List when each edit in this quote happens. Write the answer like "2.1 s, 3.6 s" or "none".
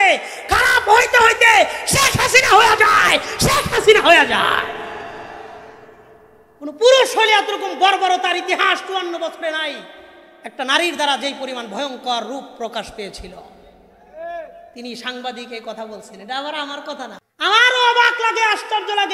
17.2 s